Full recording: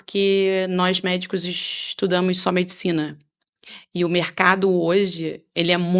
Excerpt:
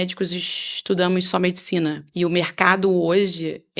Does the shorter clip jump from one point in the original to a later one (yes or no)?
yes